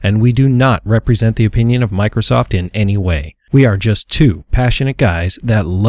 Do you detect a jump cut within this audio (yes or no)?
yes